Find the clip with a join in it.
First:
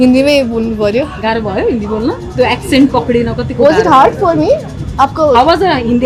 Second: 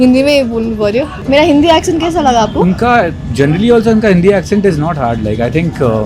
second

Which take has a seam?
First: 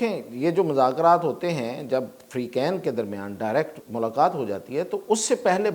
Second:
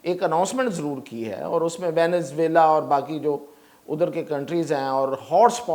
first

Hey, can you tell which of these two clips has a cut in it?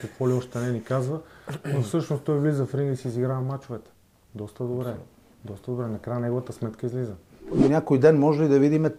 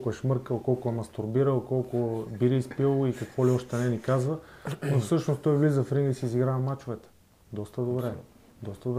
first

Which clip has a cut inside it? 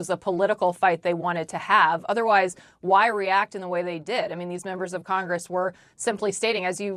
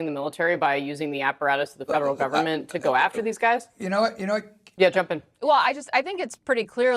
second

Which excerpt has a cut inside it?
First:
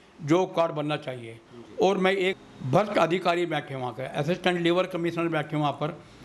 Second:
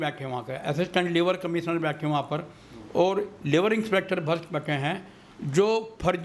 first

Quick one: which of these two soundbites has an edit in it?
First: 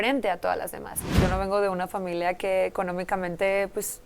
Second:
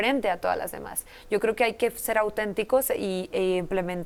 first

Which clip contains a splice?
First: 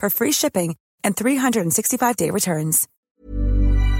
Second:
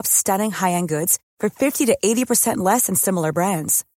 first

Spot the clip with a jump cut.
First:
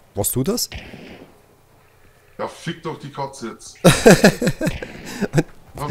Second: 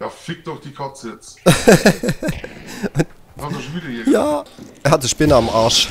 second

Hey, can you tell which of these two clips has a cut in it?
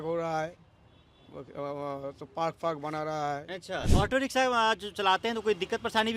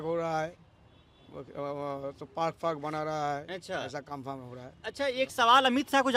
first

